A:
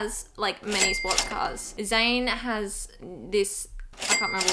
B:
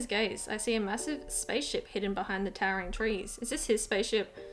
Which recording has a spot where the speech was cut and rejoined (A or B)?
A